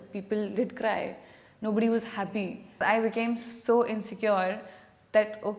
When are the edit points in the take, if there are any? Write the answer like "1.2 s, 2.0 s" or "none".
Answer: 2.8 s